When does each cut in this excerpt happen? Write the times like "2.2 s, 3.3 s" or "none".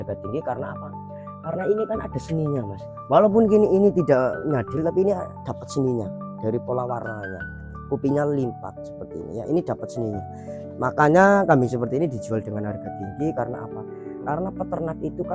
none

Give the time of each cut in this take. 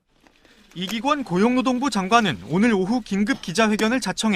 2.7 s

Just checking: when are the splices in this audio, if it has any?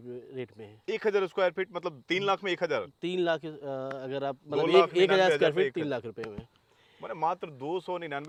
none

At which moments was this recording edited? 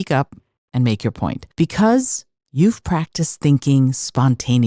1.4 s

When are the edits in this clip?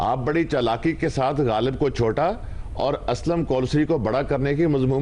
none

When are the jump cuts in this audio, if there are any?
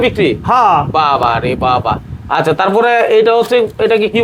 none

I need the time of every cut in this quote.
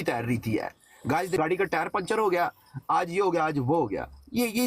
1.4 s

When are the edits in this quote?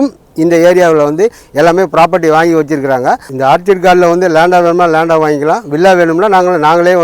3.3 s

